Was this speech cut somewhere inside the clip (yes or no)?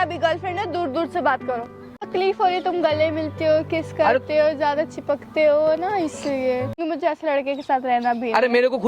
yes